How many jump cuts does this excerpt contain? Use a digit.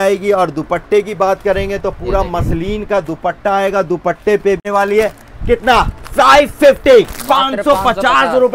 1